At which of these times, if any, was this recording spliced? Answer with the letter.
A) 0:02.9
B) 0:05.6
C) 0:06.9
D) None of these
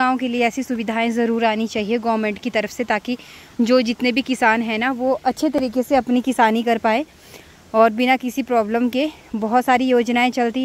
D